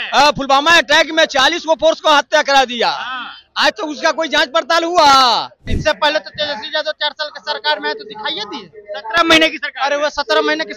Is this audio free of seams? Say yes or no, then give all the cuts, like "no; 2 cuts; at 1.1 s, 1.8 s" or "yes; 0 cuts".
no; 1 cut; at 5.7 s